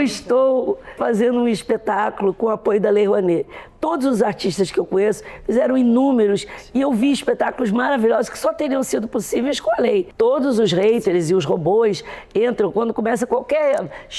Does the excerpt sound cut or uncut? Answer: cut